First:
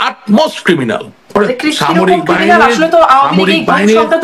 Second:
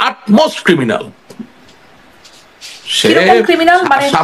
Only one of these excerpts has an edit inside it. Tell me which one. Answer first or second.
first